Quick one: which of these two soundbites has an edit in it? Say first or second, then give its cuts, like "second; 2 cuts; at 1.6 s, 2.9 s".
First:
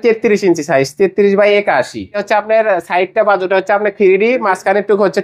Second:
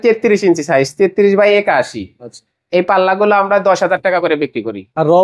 first; 1 cut; at 2.2 s